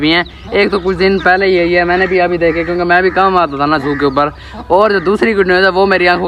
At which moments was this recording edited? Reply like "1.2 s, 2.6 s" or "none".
none